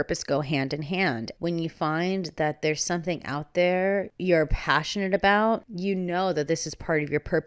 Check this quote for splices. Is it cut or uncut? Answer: cut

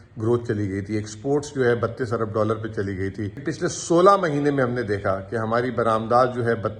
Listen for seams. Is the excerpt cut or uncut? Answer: cut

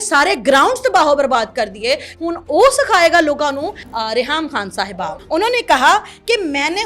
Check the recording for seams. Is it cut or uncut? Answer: cut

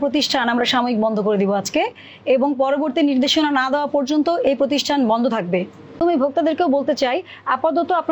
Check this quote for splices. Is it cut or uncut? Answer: cut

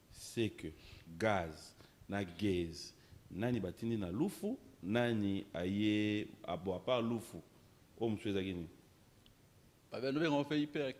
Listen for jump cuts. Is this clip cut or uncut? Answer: uncut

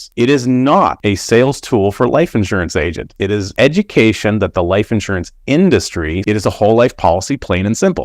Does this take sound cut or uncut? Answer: cut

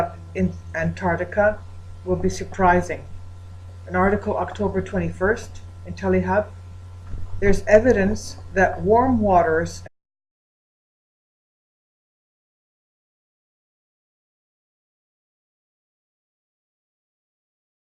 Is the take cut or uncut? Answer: uncut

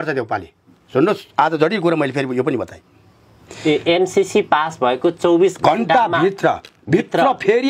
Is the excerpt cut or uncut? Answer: uncut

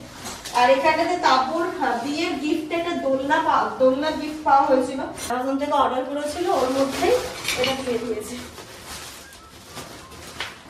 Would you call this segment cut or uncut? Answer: cut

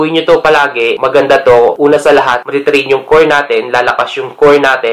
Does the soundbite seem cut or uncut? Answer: cut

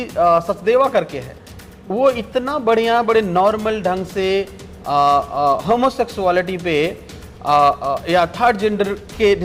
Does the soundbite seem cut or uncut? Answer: uncut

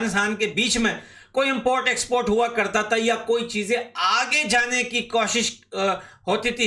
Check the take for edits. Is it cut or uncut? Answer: uncut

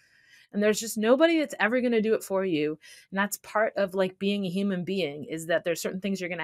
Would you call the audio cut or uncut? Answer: uncut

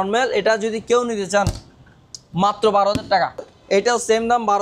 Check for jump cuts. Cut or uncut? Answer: cut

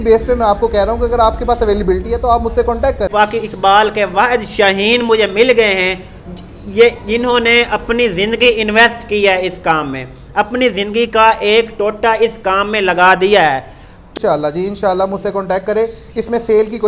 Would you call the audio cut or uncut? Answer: cut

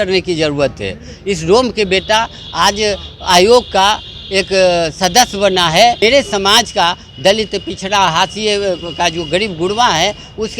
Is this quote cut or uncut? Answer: cut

